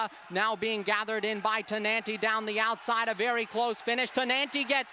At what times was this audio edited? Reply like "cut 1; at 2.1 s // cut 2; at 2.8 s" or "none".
none